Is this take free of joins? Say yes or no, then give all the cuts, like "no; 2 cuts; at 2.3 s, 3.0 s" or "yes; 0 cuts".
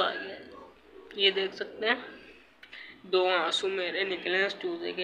yes; 0 cuts